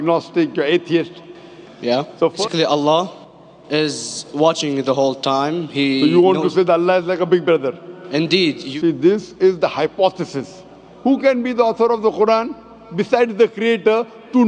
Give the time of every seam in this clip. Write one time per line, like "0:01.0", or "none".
0:02.4
0:08.6
0:10.9